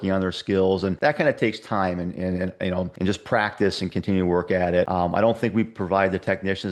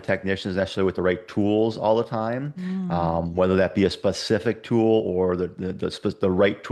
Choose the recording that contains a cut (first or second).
first